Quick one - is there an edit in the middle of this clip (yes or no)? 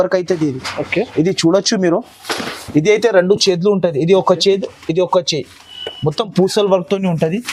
no